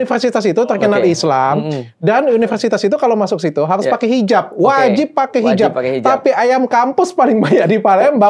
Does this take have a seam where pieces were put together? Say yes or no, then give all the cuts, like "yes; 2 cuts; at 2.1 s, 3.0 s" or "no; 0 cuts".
no; 0 cuts